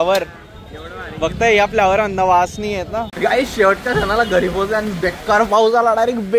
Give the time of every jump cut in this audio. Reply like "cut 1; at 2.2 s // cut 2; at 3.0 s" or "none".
cut 1; at 3.1 s